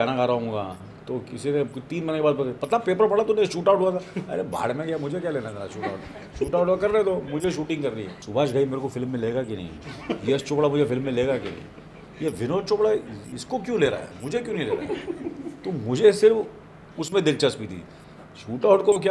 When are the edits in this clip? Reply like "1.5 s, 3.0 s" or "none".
8.1 s